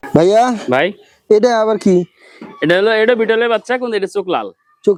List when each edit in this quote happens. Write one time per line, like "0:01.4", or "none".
none